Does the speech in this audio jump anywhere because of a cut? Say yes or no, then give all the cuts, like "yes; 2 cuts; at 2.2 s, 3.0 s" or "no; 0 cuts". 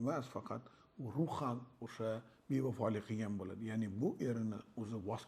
no; 0 cuts